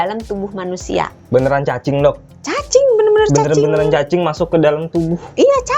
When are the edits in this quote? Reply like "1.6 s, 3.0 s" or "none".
1.2 s